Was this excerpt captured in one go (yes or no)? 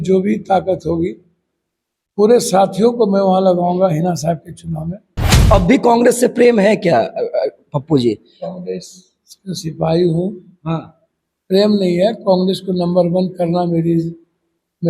no